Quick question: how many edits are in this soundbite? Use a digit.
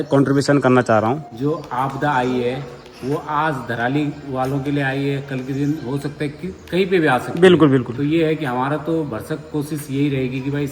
1